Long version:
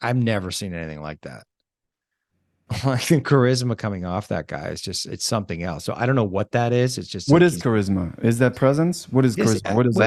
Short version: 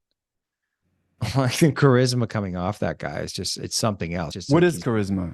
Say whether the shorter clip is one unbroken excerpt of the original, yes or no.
no